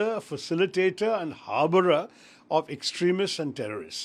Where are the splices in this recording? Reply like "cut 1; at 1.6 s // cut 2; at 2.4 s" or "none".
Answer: none